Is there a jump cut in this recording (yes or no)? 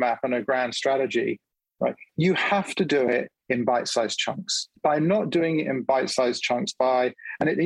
yes